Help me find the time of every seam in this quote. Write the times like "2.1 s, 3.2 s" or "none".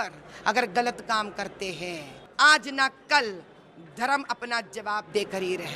2.2 s